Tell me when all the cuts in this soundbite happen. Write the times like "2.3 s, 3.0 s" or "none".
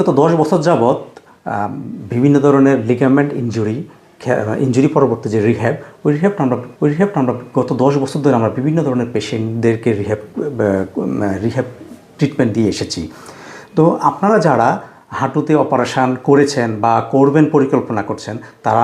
none